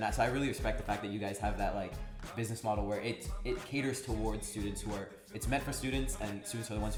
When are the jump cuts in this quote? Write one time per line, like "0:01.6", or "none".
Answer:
none

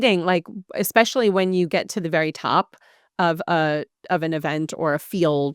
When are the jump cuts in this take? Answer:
none

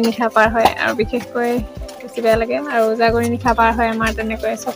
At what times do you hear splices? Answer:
0:02.1

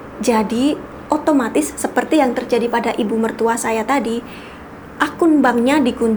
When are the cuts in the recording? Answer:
none

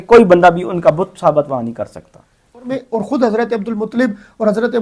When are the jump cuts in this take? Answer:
0:02.7

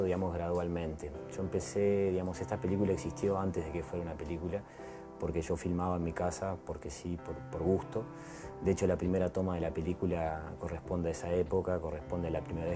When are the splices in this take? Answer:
0:07.8

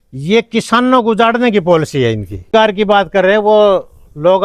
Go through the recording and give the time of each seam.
0:02.5

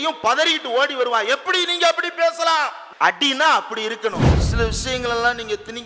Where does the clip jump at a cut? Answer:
0:02.8
0:04.4

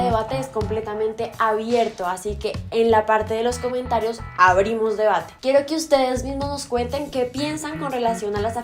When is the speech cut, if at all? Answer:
none

